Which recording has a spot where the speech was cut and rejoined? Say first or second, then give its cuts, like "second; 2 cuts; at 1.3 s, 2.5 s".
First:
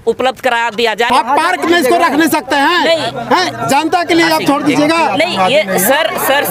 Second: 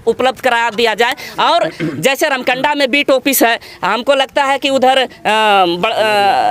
first; 1 cut; at 1.1 s